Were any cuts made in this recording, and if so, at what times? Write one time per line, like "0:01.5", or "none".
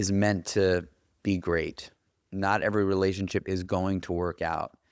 none